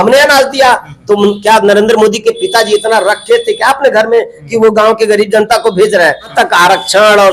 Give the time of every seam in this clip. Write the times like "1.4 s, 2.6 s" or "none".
6.3 s